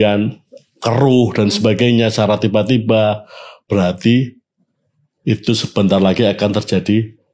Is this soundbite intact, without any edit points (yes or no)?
yes